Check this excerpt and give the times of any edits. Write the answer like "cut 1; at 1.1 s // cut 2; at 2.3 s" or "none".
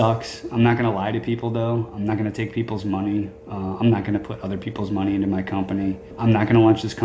cut 1; at 6.1 s

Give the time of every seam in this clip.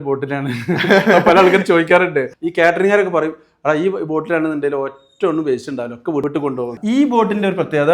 cut 1; at 2.3 s // cut 2; at 6.6 s

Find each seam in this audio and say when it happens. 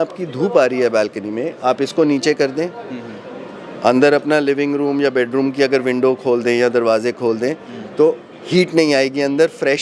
none

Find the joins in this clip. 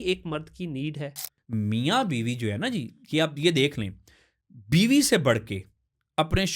cut 1; at 1.3 s

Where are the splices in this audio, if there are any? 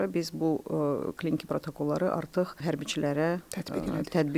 cut 1; at 2.6 s

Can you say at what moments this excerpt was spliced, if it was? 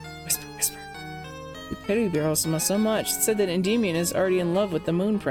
none

